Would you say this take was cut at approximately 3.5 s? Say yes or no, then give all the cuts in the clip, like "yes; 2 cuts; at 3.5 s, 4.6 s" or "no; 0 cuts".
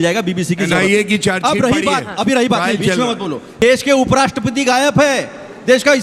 yes; 1 cut; at 3.5 s